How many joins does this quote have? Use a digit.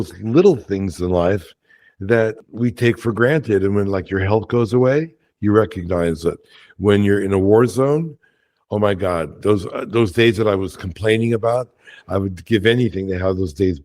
1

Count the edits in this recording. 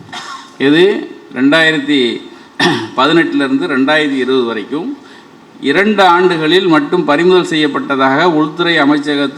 0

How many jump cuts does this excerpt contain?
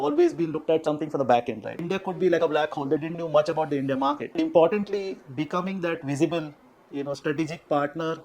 2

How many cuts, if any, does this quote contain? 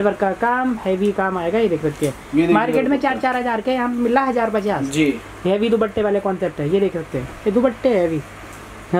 0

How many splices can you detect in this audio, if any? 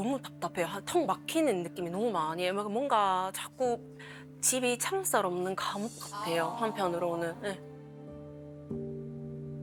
0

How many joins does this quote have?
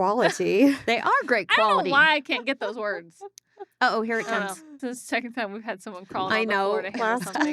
1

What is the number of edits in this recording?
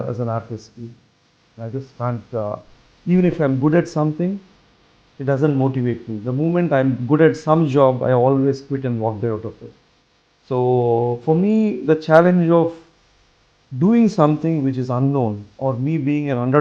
1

